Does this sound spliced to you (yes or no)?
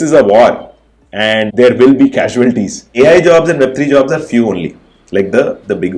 yes